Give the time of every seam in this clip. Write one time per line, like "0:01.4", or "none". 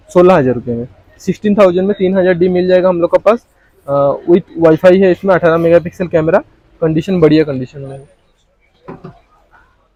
none